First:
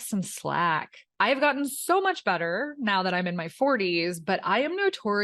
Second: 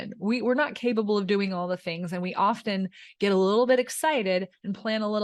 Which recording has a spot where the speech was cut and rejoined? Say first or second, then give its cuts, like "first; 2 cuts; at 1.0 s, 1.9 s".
first; 1 cut; at 1.0 s